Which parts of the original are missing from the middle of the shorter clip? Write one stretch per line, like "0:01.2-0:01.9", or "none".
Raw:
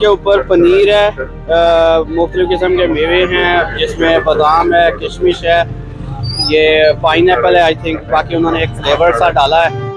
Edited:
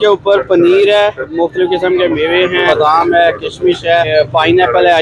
0:01.3-0:02.1
0:03.4-0:04.2
0:05.7-0:06.8